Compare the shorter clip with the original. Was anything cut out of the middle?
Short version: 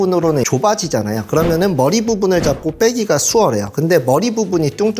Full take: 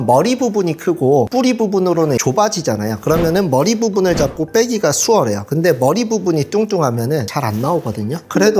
no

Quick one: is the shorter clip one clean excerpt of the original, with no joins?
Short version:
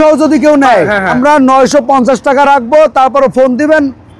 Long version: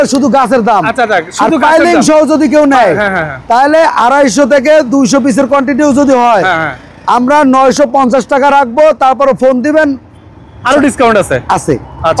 no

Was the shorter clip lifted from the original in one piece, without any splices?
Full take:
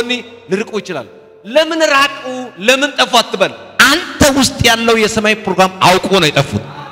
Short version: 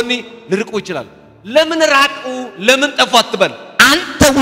yes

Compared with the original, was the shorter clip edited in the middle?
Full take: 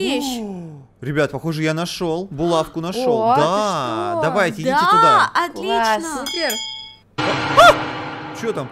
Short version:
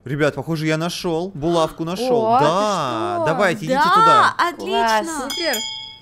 no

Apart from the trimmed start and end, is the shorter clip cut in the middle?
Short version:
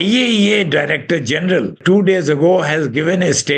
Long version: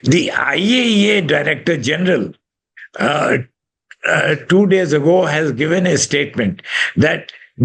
yes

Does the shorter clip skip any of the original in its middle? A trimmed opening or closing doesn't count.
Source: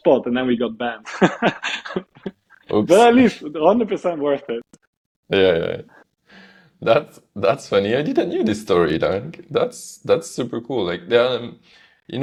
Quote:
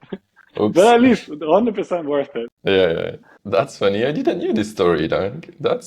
yes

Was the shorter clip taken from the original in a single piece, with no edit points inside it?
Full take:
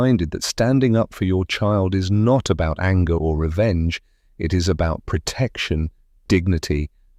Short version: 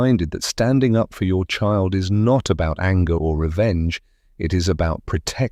yes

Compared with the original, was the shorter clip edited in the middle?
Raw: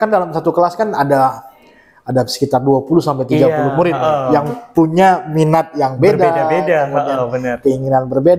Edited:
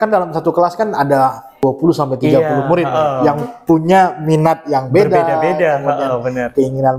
yes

